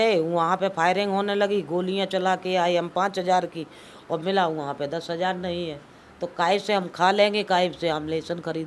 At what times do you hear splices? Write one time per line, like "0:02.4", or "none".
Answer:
none